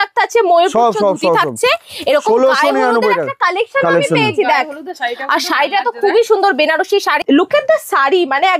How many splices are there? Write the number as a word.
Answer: one